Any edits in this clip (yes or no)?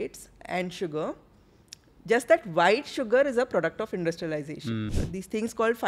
yes